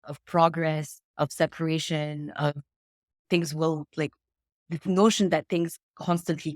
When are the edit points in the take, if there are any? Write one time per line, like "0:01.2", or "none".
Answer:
0:01.0